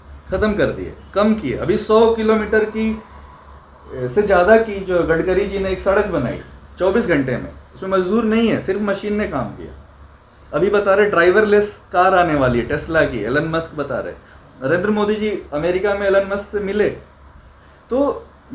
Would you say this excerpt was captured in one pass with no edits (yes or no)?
yes